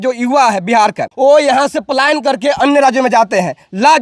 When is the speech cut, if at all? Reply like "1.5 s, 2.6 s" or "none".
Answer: 1.0 s